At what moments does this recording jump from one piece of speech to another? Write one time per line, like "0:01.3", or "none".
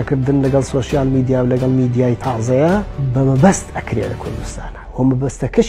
none